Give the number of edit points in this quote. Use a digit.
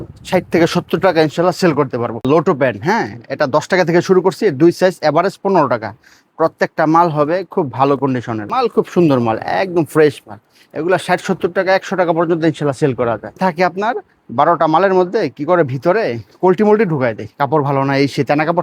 3